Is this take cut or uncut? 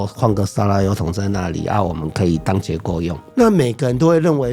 cut